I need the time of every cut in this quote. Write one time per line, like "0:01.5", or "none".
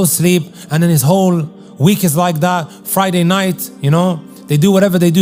none